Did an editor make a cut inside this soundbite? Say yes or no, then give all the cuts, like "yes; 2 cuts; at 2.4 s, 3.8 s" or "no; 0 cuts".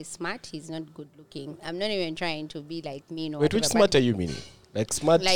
yes; 1 cut; at 1.6 s